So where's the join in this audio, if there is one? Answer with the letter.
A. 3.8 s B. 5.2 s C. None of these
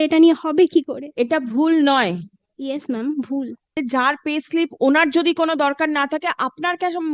A